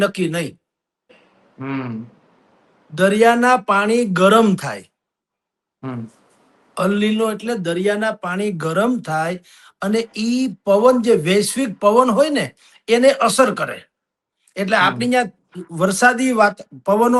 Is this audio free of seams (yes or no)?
yes